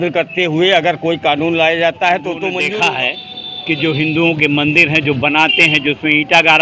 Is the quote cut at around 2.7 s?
yes; 1 cut; at 2.7 s

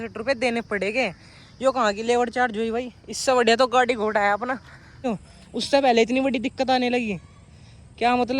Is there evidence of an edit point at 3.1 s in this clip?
no; 1 cut; at 5.0 s

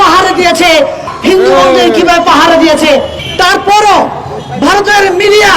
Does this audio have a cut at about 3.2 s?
yes; 2 cuts; at 1.1 s, 3.2 s

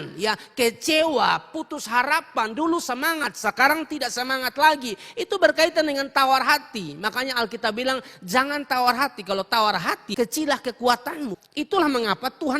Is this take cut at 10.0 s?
yes; 2 cuts; at 10.0 s, 11.4 s

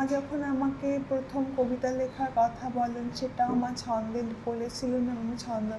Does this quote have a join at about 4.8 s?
no; 0 cuts

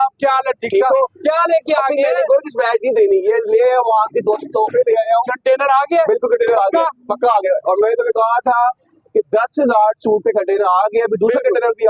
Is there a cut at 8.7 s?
no; 0 cuts

